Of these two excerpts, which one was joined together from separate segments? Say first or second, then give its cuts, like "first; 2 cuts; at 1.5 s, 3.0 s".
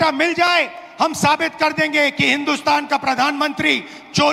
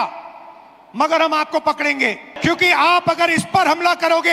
second; 1 cut; at 2.4 s